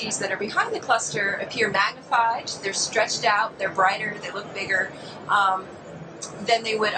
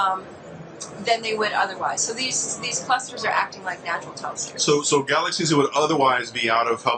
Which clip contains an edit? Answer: second; 1 cut; at 5.0 s

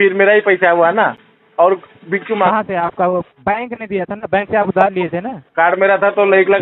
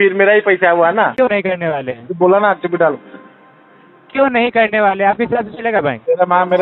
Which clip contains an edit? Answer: second; 1 cut; at 1.1 s

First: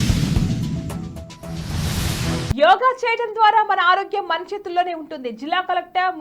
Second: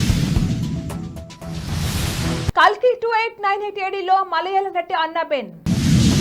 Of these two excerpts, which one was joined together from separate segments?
first; 1 cut; at 1.3 s

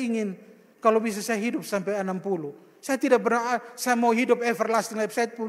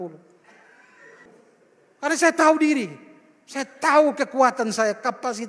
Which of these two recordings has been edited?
second; 1 cut; at 1.2 s

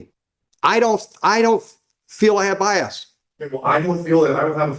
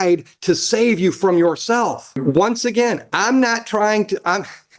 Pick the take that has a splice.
second; 1 cut; at 2.2 s

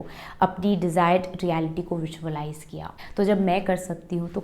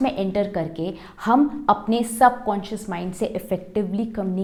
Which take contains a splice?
first; 1 cut; at 2.8 s

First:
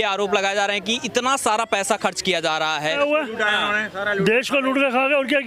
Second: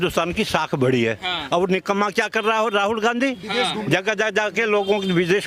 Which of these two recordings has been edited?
first; 1 cut; at 3.0 s

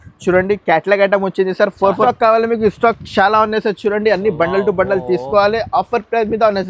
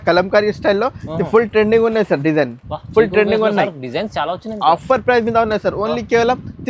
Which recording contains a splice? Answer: first; 1 cut; at 2.1 s

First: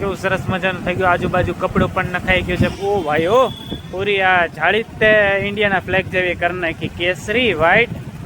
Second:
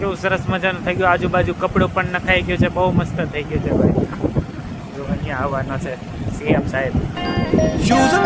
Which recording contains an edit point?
first; 1 cut; at 2.7 s

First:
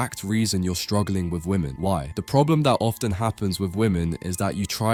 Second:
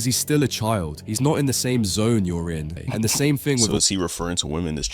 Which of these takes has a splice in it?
second; 1 cut; at 2.7 s

